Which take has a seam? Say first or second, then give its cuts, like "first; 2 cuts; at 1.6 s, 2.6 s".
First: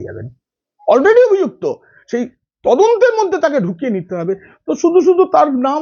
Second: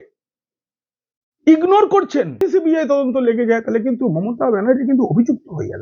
second; 1 cut; at 2.4 s